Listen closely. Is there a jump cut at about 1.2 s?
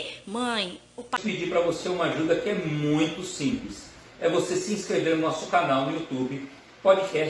yes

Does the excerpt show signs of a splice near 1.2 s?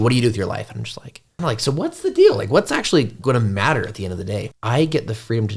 yes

